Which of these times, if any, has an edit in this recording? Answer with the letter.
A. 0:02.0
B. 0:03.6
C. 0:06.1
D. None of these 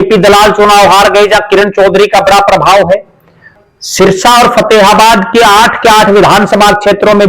B